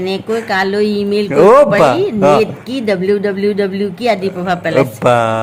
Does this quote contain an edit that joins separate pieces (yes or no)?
no